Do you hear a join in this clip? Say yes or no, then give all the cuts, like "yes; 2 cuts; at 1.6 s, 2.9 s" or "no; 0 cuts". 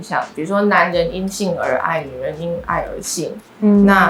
no; 0 cuts